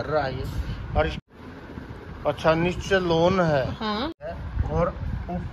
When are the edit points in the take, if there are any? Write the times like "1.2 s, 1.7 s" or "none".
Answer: 1.2 s, 4.2 s